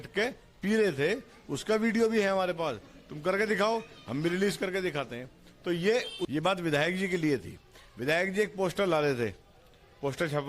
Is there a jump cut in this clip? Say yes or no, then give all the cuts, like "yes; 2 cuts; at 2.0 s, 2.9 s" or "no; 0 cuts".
yes; 1 cut; at 6.3 s